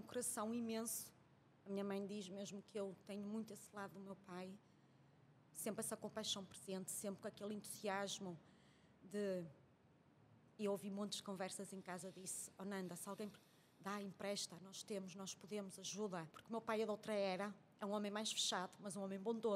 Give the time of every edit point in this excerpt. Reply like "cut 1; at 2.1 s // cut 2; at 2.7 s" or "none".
cut 1; at 16.3 s